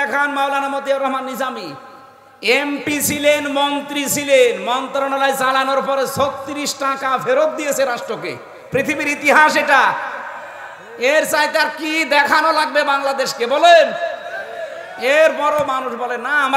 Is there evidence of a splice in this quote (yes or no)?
no